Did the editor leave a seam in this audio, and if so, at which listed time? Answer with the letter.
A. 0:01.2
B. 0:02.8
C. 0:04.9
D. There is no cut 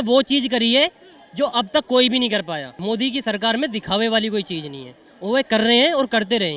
B